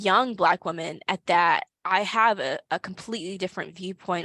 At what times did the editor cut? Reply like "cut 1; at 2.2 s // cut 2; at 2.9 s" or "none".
cut 1; at 1.7 s